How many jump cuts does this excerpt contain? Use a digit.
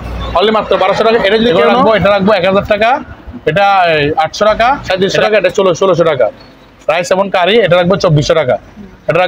2